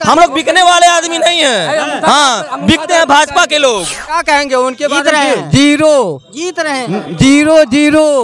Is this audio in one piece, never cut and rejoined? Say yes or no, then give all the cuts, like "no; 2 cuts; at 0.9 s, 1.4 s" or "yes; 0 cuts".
no; 1 cut; at 4.1 s